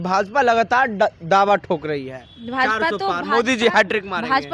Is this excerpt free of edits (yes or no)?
yes